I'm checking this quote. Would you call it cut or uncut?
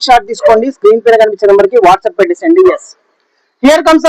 uncut